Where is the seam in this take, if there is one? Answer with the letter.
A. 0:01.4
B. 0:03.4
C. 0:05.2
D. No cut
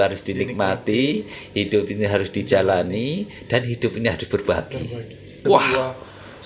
C